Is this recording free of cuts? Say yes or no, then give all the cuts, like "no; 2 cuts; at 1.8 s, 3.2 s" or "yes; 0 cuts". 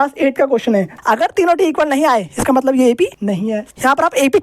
no; 2 cuts; at 0.9 s, 3.5 s